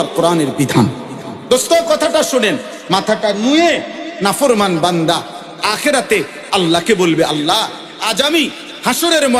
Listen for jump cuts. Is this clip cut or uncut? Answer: cut